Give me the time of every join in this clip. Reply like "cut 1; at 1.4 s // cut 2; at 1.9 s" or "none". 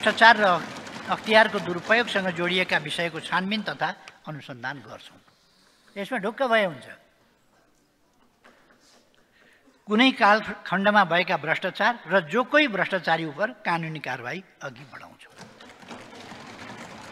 none